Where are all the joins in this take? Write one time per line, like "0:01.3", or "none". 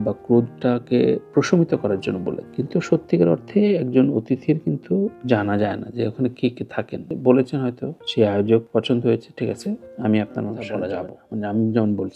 0:07.1
0:11.2